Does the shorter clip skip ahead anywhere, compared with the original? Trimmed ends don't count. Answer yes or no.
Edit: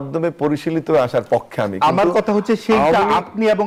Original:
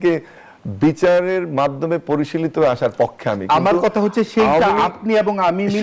no